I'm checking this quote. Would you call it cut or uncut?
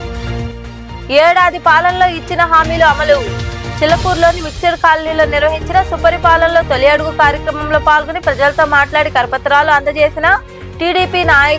uncut